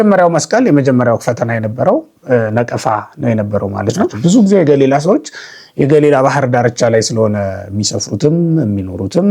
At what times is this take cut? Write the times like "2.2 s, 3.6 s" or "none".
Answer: 4.1 s